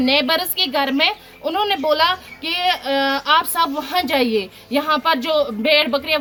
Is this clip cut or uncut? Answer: uncut